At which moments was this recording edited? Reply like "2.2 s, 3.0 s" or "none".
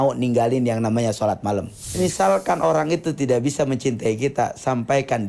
1.9 s